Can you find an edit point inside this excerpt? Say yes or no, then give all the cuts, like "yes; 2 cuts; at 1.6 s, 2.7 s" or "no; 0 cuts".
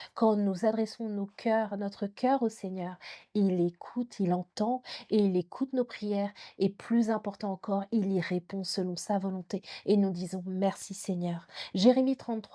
no; 0 cuts